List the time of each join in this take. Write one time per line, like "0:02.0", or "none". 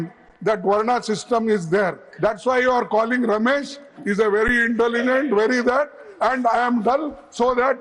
none